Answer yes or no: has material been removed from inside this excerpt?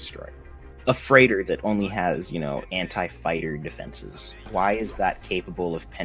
yes